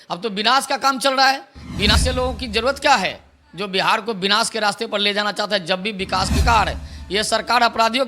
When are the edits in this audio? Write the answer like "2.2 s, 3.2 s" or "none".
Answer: 1.9 s, 6.4 s